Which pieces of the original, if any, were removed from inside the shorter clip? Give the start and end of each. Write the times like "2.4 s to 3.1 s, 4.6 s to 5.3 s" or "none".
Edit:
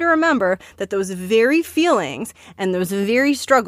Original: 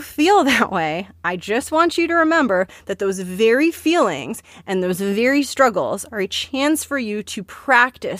none